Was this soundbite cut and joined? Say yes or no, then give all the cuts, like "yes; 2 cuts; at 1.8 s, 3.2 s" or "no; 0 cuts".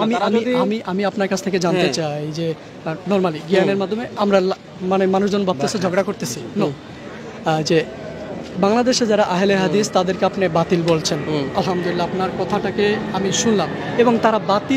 no; 0 cuts